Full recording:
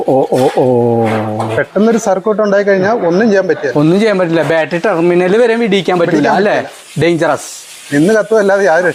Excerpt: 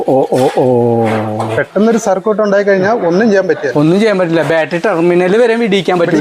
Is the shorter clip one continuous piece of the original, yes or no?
yes